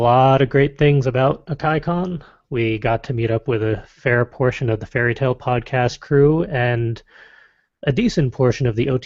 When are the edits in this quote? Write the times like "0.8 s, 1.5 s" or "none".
5.6 s